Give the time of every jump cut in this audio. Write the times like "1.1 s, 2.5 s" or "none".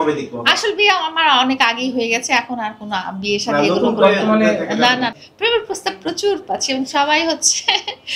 none